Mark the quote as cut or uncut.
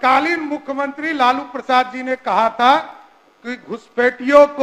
uncut